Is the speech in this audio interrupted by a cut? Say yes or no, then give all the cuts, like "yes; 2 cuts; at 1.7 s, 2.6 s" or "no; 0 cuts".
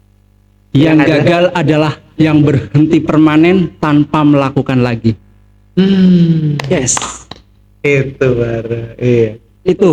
no; 0 cuts